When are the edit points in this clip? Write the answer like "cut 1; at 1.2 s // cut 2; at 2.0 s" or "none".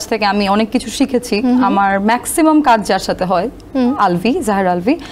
none